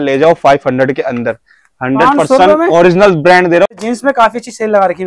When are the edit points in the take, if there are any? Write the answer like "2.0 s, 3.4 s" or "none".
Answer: 3.8 s